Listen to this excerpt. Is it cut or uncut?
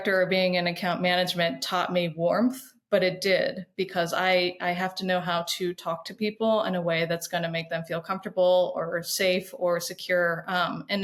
uncut